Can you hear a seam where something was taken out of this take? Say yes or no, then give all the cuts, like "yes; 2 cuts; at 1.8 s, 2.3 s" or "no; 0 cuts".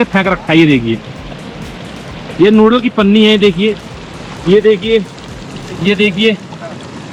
no; 0 cuts